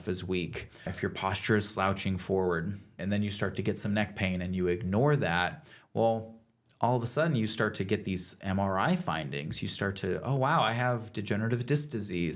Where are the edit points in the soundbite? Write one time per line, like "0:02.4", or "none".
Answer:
0:00.9
0:02.9

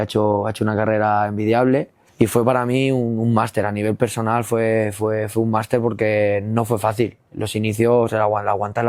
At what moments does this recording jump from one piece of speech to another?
0:02.0

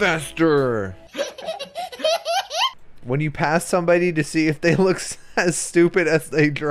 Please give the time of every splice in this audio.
0:02.8

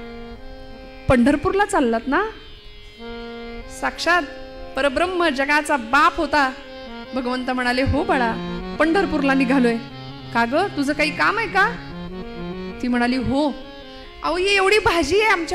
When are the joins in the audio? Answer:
none

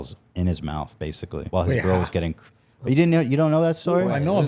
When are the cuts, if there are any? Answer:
0:01.5

